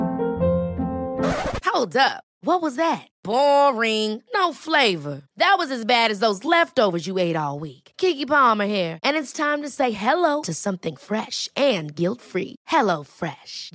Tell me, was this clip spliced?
no; 0 cuts

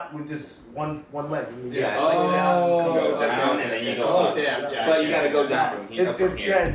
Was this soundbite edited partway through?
no; 0 cuts

